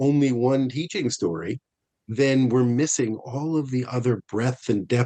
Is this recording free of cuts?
yes; 0 cuts

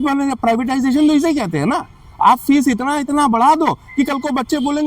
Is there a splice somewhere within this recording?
no; 0 cuts

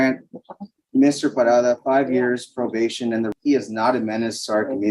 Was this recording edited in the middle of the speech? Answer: yes; 1 cut; at 3.3 s

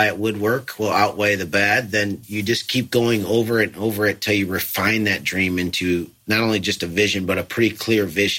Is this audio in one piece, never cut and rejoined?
no; 2 cuts; at 2.2 s, 6.2 s

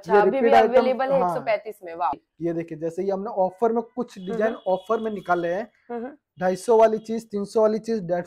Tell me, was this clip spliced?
yes; 1 cut; at 2.2 s

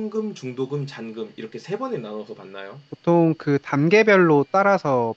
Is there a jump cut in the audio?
no; 0 cuts

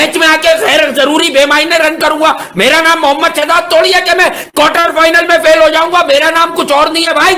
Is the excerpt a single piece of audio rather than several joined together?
yes; 0 cuts

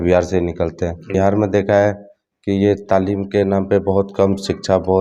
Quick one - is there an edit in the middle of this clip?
yes; 1 cut; at 1.1 s

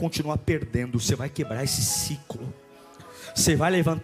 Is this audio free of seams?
yes; 0 cuts

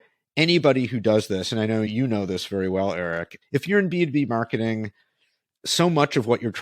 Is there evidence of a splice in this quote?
yes; 2 cuts; at 1.9 s, 3.3 s

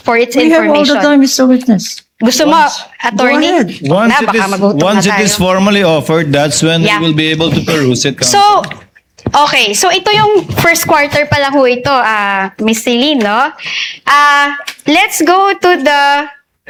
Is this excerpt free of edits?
yes; 0 cuts

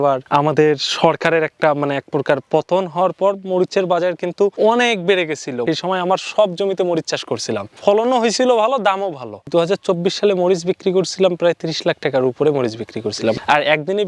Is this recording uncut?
yes; 0 cuts

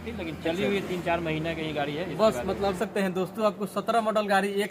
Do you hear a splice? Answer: yes; 1 cut; at 2.8 s

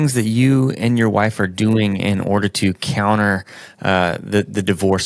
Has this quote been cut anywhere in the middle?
no; 0 cuts

